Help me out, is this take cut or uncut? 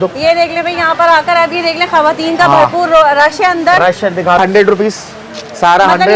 uncut